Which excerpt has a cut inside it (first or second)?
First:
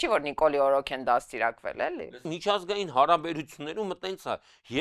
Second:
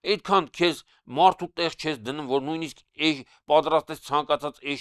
first